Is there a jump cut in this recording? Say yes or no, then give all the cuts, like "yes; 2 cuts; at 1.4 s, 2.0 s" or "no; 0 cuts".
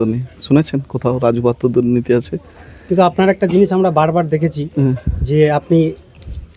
no; 0 cuts